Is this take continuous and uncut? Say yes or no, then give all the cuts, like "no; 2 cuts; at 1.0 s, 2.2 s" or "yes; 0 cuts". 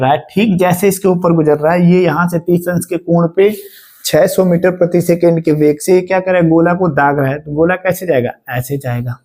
yes; 0 cuts